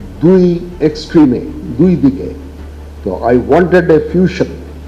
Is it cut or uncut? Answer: uncut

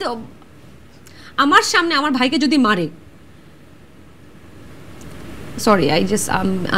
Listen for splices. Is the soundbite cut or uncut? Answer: uncut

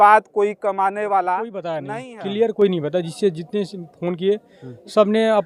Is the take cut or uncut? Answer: cut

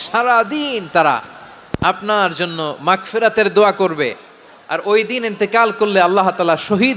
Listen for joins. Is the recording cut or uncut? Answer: uncut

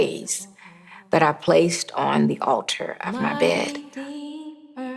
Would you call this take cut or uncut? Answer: cut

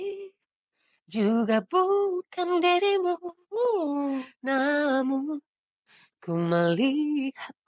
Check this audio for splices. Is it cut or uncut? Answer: uncut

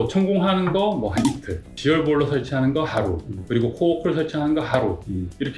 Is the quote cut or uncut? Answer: uncut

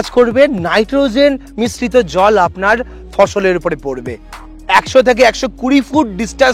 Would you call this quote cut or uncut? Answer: cut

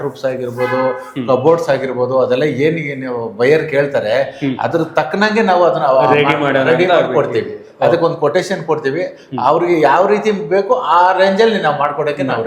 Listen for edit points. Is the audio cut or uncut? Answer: uncut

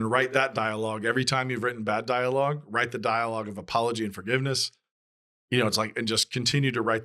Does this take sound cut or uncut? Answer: uncut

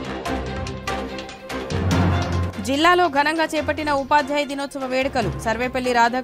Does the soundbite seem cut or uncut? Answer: uncut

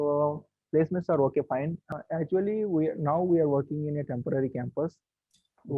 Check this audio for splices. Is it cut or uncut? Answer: cut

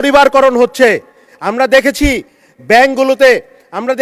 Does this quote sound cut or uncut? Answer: uncut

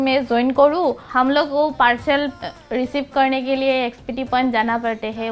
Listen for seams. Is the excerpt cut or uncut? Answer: cut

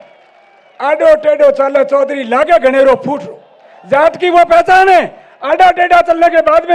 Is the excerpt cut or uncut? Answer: uncut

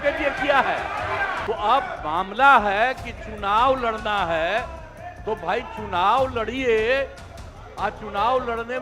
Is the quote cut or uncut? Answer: cut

